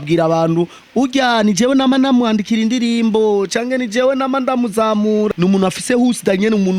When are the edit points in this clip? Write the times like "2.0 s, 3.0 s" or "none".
5.3 s